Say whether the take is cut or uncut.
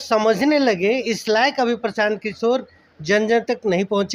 uncut